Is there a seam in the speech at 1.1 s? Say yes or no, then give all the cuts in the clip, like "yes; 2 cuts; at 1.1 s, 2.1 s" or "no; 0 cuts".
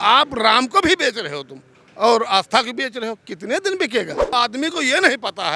no; 1 cut; at 4.4 s